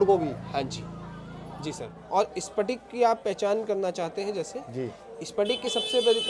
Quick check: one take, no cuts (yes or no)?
no